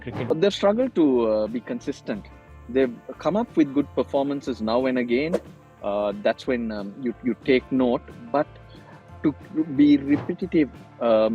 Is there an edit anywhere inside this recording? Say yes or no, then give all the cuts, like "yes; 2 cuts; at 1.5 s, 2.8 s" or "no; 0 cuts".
no; 0 cuts